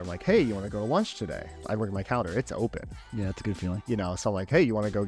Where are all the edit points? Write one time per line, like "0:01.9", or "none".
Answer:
0:01.6
0:03.8

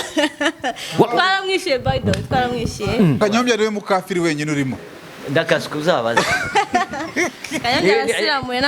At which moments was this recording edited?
0:03.2

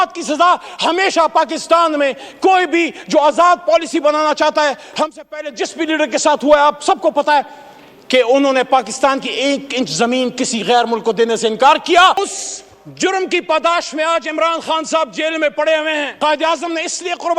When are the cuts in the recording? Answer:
0:12.3
0:16.1

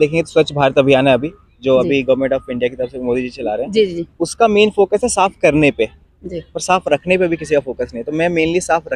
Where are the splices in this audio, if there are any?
none

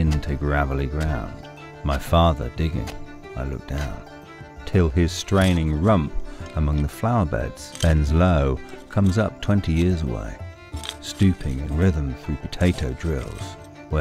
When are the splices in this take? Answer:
0:04.0

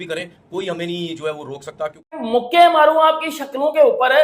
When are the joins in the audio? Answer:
0:02.2

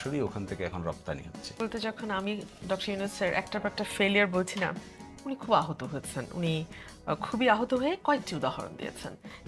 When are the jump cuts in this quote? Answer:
0:01.6

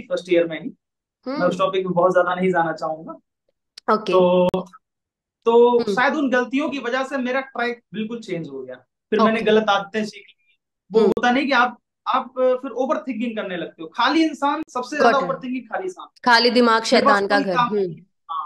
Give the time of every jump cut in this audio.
none

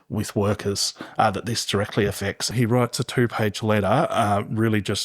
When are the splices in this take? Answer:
0:02.5

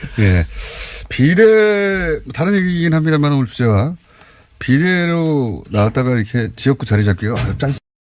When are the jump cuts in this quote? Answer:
none

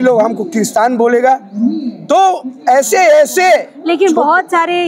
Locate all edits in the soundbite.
none

